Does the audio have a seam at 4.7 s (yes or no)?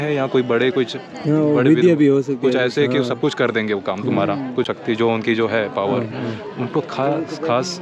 yes